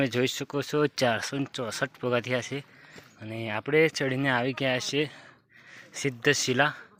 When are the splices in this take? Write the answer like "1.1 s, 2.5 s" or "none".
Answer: none

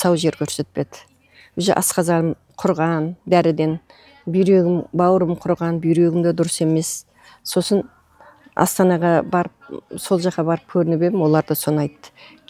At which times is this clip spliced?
none

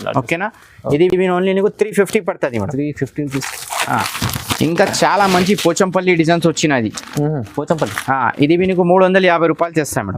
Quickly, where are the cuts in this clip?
none

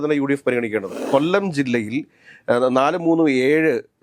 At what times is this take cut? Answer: 1.0 s

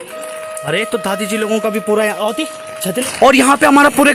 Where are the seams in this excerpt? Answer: 3.0 s

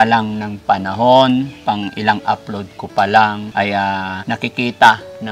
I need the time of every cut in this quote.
1.5 s, 3.4 s, 4.2 s

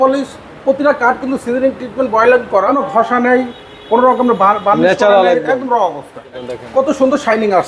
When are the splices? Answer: 2.8 s, 6.3 s

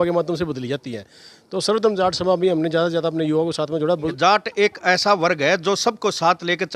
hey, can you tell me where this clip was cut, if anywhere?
4.1 s

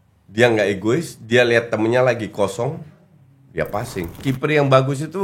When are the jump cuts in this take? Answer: 4.2 s

